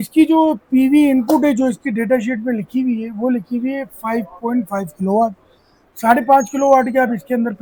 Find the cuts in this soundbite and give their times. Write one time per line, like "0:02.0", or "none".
none